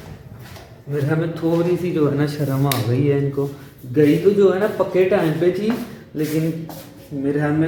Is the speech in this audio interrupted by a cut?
no; 0 cuts

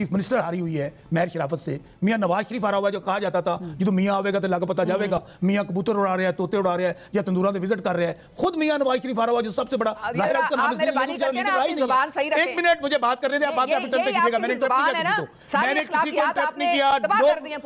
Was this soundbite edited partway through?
no; 0 cuts

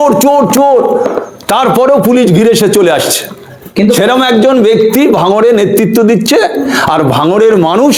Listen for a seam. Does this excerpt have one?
no; 0 cuts

